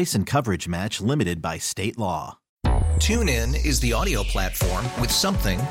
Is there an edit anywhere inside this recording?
yes; 1 cut; at 2.4 s

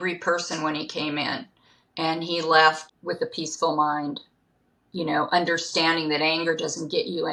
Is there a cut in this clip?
no; 0 cuts

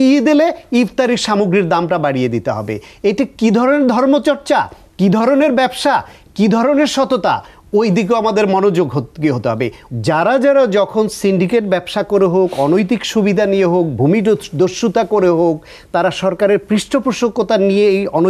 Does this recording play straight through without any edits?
no; 1 cut; at 9.8 s

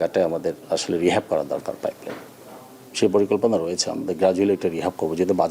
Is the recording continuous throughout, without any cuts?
yes; 0 cuts

